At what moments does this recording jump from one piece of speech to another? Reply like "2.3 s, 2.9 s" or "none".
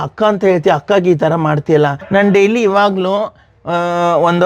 2.0 s